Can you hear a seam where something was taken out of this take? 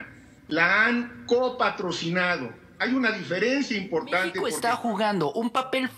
yes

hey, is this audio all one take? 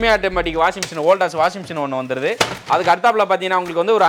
yes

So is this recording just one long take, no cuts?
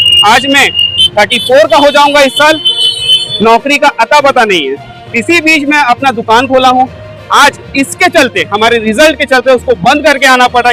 yes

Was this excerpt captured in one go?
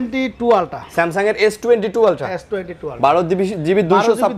yes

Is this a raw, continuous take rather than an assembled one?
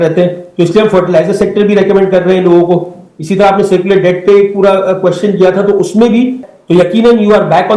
no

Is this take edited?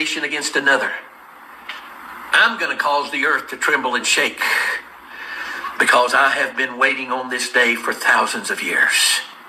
yes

